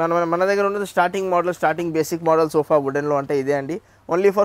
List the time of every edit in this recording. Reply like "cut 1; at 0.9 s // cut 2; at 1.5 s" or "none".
none